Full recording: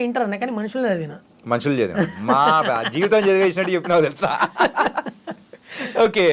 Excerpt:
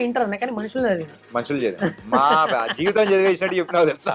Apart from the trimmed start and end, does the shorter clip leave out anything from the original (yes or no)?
yes